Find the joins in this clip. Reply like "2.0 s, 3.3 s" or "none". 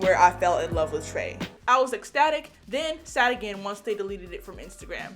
1.6 s